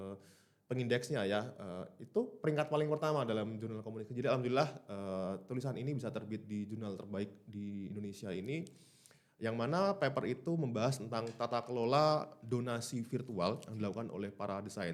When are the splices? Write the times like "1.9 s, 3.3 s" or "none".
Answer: none

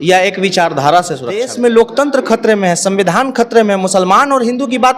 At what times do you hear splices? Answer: 1.5 s

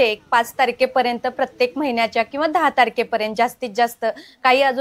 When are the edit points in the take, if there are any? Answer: none

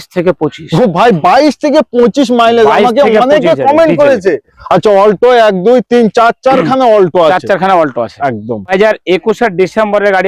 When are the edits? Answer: 4.5 s, 8.7 s

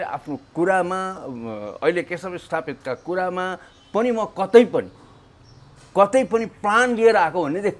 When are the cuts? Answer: none

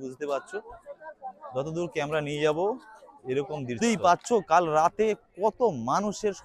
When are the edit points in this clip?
3.8 s

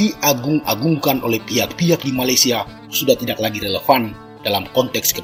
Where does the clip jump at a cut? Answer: none

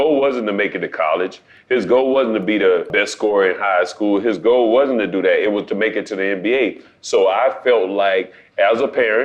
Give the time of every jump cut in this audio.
2.9 s

